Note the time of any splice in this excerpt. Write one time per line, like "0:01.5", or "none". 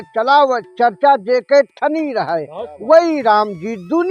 none